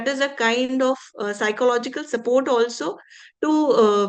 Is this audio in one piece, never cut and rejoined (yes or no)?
yes